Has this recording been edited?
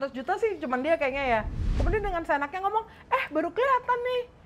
yes; 1 cut; at 1.6 s

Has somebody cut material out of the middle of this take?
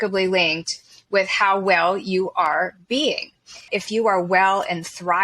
yes; 1 cut; at 3.7 s

